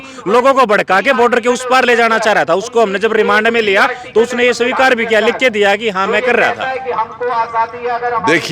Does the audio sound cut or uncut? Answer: uncut